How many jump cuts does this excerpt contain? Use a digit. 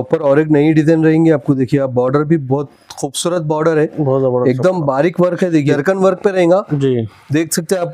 1